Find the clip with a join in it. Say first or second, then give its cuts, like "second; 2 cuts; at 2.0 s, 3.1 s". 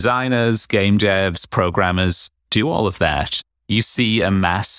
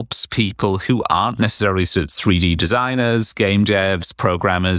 first; 1 cut; at 3.4 s